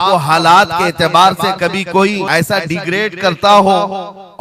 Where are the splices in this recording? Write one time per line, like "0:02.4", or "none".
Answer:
0:02.2